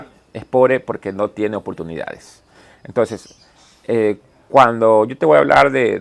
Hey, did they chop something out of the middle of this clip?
no; 0 cuts

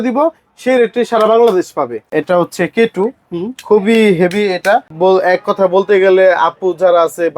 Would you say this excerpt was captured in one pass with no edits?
no; 2 cuts; at 2.1 s, 4.9 s

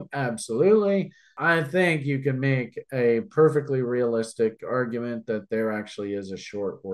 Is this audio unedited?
no; 1 cut; at 1.4 s

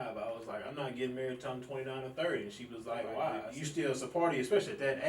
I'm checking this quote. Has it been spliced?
yes; 1 cut; at 3.5 s

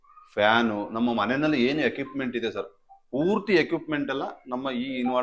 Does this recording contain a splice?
no; 0 cuts

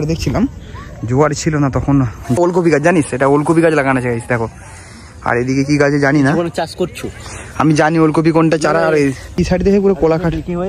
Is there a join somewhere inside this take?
yes; 2 cuts; at 2.4 s, 9.4 s

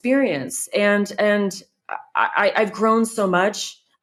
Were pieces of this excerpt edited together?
no; 0 cuts

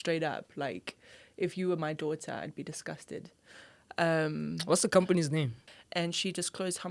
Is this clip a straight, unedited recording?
no; 1 cut; at 5.7 s

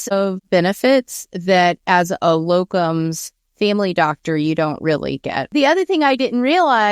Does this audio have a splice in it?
yes; 1 cut; at 5.5 s

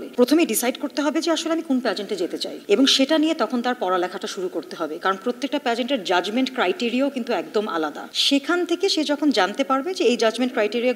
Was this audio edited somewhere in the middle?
no; 0 cuts

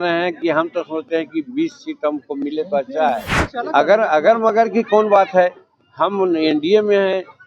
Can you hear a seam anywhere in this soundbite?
yes; 1 cut; at 3.4 s

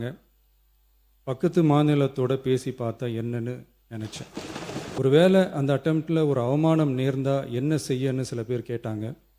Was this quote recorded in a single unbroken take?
no; 1 cut; at 5.0 s

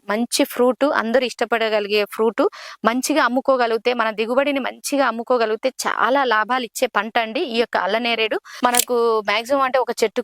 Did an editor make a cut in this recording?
yes; 1 cut; at 8.5 s

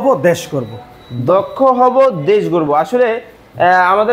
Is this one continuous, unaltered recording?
yes; 0 cuts

